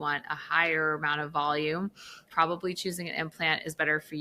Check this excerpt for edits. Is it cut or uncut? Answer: uncut